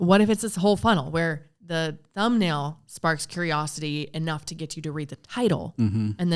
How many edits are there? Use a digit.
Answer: 1